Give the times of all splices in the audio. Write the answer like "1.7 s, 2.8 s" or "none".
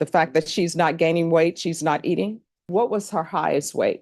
2.5 s